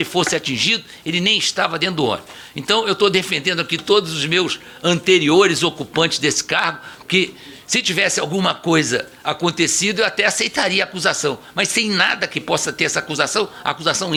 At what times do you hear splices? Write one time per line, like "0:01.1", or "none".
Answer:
none